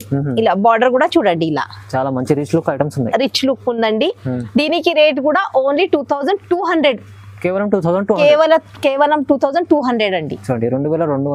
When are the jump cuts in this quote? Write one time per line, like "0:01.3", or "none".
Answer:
none

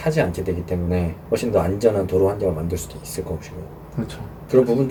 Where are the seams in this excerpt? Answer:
none

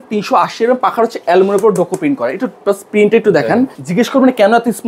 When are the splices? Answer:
0:03.8

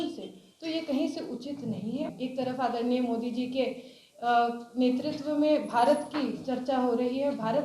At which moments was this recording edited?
0:02.1

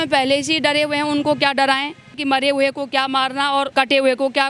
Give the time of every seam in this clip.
0:02.1
0:03.7

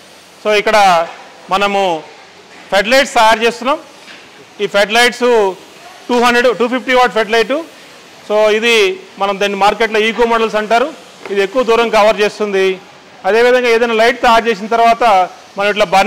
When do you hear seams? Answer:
none

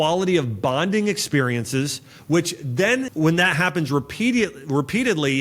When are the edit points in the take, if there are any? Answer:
0:03.1

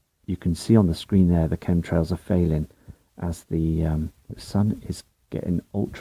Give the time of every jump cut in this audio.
none

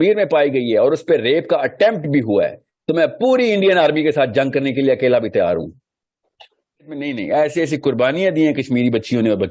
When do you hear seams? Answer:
0:07.0

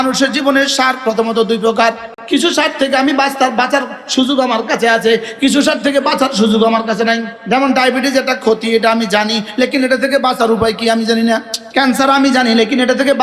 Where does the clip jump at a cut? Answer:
0:02.1
0:07.3
0:11.6

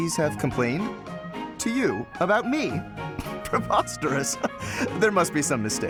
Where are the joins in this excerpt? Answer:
none

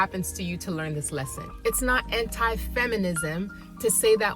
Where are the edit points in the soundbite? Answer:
0:01.4

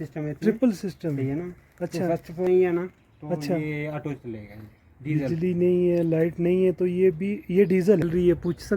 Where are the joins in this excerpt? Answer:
0:02.4
0:08.0

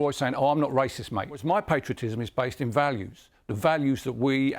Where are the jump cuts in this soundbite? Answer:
0:01.4

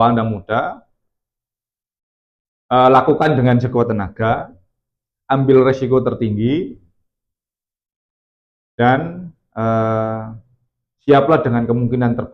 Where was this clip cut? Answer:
none

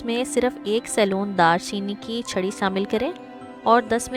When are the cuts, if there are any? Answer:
none

